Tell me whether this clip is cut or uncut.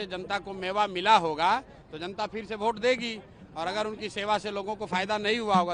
uncut